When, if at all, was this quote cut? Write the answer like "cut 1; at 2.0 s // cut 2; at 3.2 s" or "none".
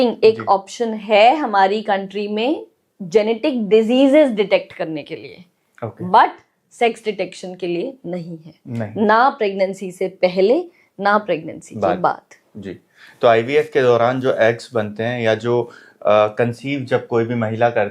none